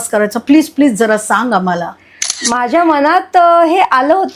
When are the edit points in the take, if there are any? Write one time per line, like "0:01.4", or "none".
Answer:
0:02.4